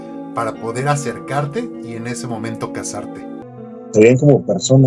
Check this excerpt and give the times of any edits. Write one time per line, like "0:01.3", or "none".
0:03.5